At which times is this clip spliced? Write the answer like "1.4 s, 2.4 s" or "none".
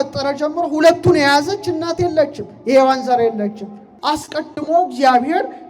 3.9 s